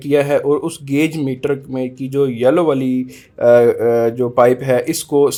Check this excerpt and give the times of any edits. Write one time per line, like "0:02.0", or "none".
none